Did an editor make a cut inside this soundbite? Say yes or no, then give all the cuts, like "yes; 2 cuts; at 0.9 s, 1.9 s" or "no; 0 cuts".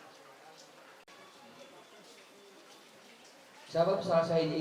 yes; 1 cut; at 1.1 s